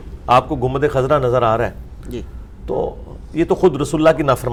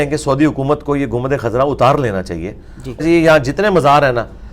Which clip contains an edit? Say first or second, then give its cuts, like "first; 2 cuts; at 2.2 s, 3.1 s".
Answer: second; 1 cut; at 3.0 s